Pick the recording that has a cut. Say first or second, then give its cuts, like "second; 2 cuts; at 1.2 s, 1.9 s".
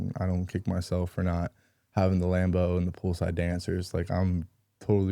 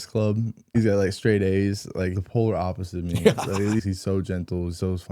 second; 3 cuts; at 0.7 s, 2.1 s, 3.8 s